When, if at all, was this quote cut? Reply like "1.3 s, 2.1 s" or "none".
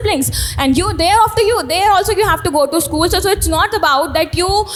none